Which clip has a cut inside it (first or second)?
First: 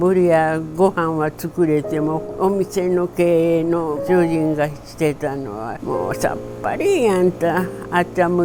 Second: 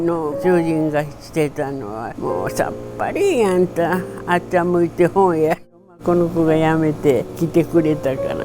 second